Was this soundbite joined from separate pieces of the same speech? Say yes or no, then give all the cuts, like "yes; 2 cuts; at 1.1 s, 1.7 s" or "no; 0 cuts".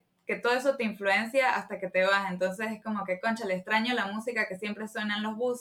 no; 0 cuts